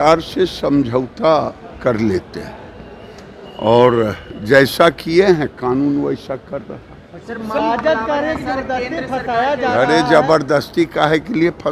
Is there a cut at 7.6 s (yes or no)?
yes